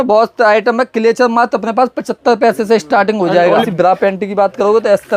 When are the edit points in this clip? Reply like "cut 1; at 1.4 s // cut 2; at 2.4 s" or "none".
cut 1; at 3.7 s